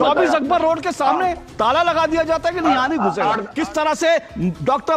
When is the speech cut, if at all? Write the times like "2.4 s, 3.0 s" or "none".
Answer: 3.5 s